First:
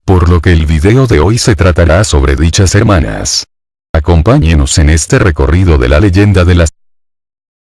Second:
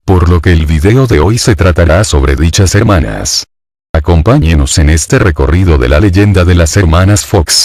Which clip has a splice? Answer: second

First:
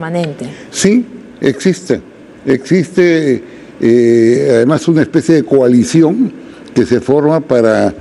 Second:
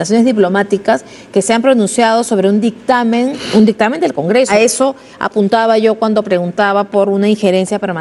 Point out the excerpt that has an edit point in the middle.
second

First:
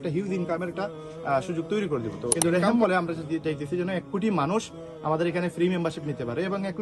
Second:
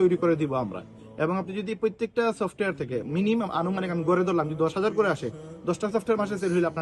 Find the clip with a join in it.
first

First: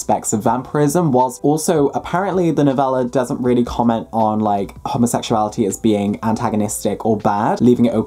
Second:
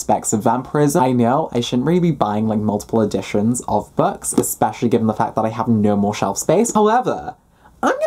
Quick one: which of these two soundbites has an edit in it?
second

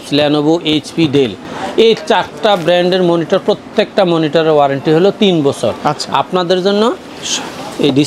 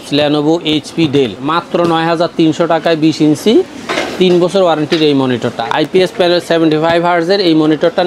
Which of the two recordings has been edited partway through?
second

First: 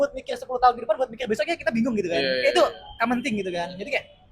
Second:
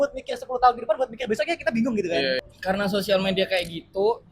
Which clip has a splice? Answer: second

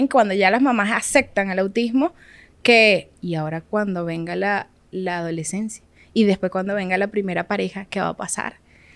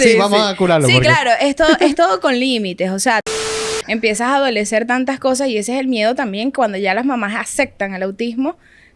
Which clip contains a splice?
second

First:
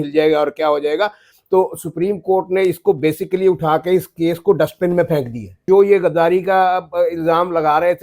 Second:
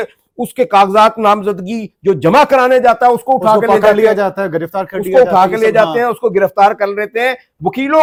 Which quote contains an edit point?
first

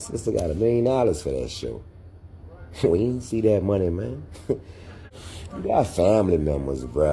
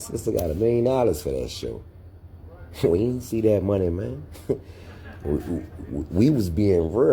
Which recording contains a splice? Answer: first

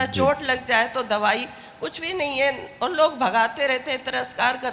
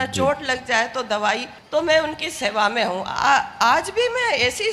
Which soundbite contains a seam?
second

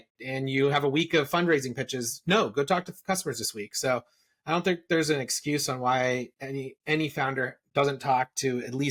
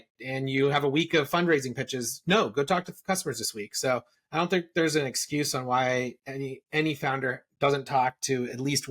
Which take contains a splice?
second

